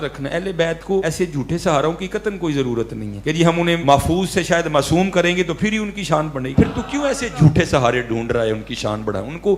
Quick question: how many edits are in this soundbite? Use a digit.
3